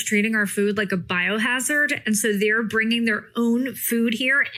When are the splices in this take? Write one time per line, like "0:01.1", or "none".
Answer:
none